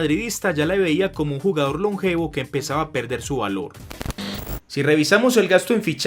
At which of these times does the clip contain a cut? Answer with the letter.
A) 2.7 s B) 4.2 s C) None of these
B